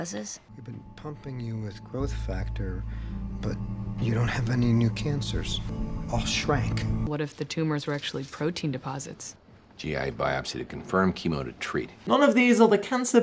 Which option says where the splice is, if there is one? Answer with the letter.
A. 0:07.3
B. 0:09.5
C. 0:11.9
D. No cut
C